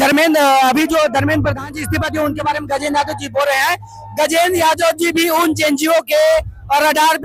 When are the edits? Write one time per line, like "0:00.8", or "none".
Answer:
none